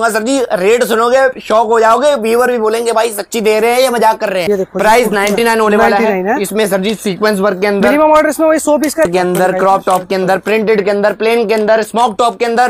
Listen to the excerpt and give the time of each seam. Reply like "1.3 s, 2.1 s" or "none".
4.4 s, 9.1 s